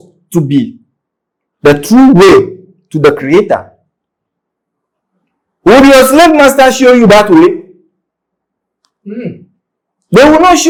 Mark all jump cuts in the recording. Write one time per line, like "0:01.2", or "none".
none